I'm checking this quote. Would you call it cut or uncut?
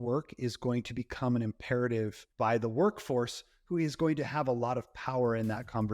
cut